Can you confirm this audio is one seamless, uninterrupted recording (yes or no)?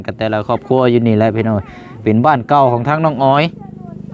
yes